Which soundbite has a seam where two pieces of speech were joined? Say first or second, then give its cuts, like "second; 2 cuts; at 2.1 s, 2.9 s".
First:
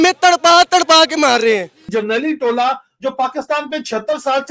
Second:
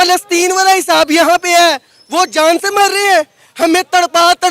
first; 1 cut; at 1.8 s